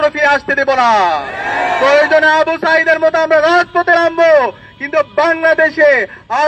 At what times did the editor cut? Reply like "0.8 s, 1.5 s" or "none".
none